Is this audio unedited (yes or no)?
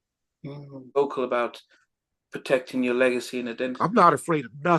no